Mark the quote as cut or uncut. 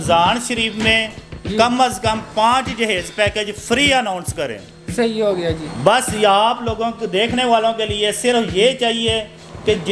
uncut